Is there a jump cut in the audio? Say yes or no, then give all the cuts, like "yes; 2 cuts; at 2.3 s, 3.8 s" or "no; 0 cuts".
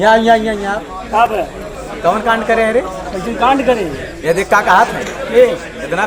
no; 0 cuts